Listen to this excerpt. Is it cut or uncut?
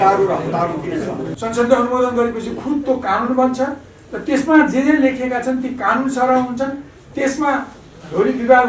cut